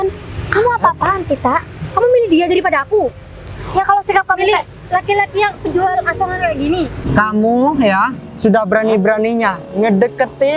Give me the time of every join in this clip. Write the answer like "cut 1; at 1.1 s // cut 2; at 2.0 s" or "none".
cut 1; at 7.0 s